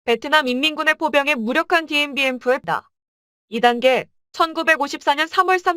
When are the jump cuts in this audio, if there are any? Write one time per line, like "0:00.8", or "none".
0:02.6